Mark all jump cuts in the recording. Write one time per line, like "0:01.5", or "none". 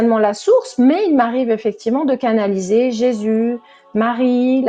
none